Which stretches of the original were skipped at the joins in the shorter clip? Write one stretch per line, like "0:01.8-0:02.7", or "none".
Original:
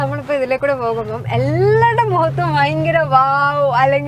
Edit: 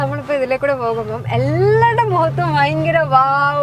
none